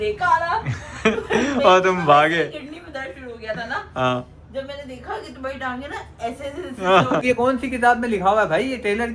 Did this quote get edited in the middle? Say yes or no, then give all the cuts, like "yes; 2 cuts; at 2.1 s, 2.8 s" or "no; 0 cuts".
yes; 1 cut; at 7.2 s